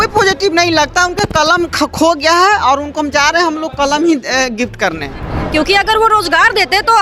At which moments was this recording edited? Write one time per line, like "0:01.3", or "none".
0:05.3